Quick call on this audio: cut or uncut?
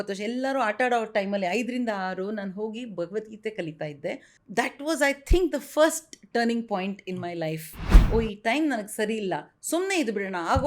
cut